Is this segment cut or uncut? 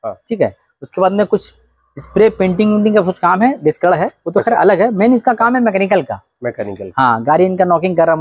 uncut